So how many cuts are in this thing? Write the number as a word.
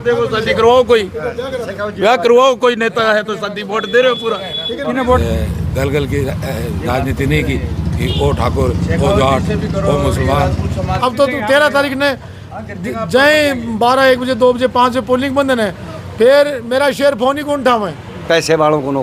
three